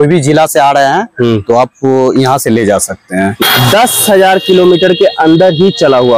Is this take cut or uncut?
cut